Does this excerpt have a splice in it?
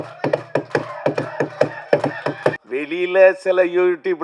yes; 1 cut; at 2.6 s

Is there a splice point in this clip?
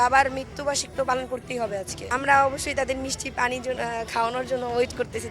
yes; 1 cut; at 2.1 s

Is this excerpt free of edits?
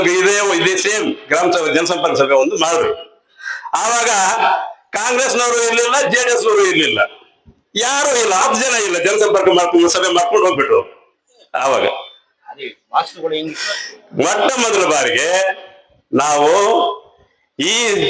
no; 1 cut; at 13.6 s

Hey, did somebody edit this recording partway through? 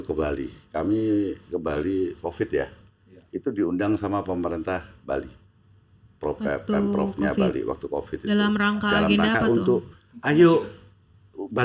no; 0 cuts

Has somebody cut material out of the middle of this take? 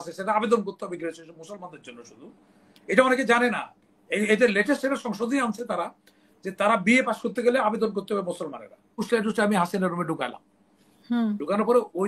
yes; 1 cut; at 9.1 s

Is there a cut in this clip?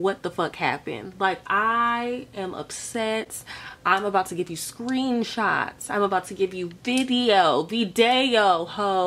no; 0 cuts

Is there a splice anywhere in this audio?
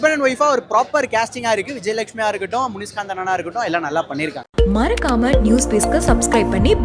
yes; 1 cut; at 4.4 s

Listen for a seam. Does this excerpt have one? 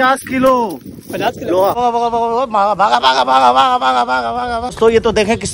yes; 1 cut; at 1.8 s

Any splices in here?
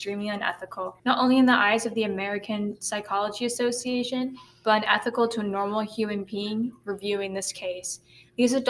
yes; 1 cut; at 1.0 s

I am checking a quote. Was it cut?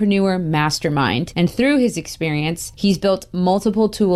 yes; 1 cut; at 1.3 s

